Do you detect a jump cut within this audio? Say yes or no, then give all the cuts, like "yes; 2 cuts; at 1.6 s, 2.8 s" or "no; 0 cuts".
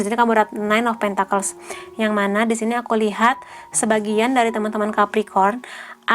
no; 0 cuts